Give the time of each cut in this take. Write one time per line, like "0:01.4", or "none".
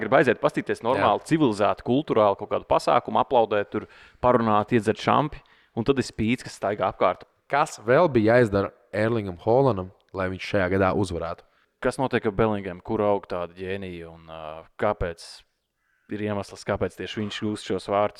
0:07.3
0:11.6

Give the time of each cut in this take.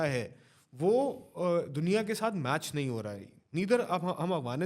none

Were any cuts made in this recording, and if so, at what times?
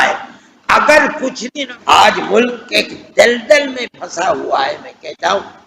0:01.5

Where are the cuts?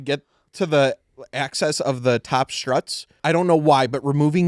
0:03.0

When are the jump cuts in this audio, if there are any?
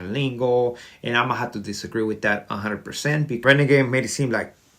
0:03.4

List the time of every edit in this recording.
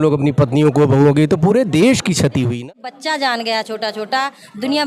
0:02.6

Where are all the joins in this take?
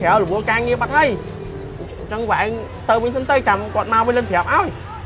none

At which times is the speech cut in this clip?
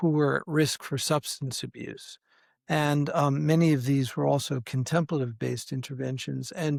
none

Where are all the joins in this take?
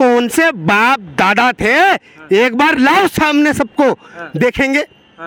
none

